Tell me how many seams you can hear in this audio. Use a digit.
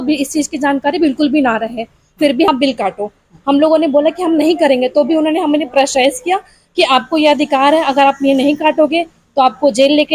1